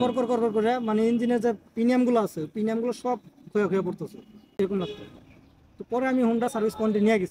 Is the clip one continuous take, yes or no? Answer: yes